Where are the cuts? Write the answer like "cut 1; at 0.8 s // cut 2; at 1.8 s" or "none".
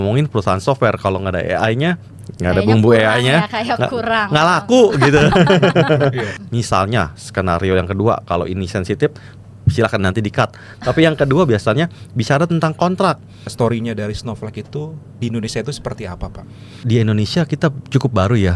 cut 1; at 6.4 s // cut 2; at 13.5 s // cut 3; at 16.8 s